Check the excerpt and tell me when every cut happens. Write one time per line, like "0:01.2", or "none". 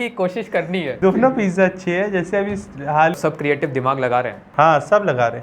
0:03.1

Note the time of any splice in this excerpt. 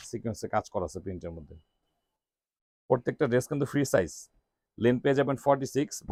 none

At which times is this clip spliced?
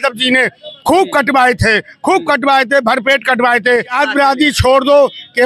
0:03.8

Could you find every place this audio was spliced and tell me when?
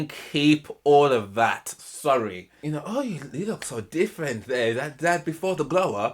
0:02.6

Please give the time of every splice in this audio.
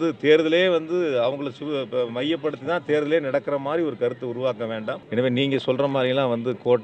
0:05.0

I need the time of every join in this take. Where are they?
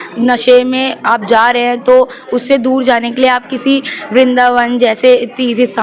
none

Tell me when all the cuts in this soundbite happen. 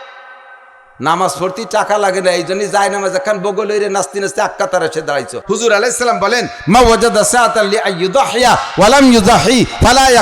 0:05.4

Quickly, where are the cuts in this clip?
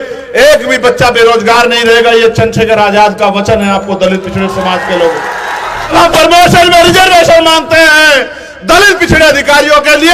0:05.9

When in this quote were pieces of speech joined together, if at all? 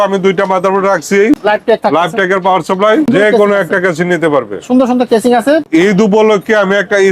0:01.4
0:03.1
0:05.7

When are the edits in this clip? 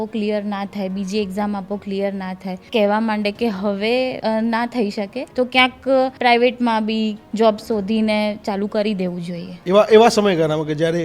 0:02.6
0:04.2
0:05.2
0:06.1
0:09.5

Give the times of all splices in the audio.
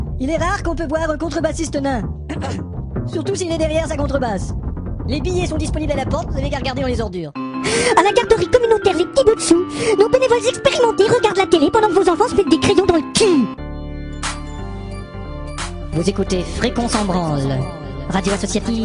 0:17.1

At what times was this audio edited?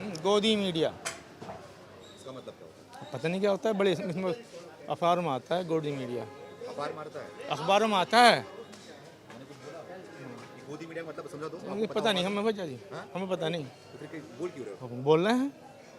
none

